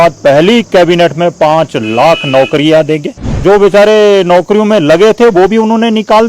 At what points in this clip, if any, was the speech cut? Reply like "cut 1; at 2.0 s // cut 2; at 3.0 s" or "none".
cut 1; at 3.3 s